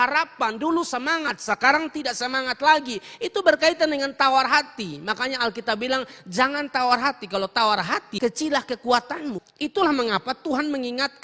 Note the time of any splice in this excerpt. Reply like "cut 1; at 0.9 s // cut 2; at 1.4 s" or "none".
cut 1; at 8.1 s // cut 2; at 9.4 s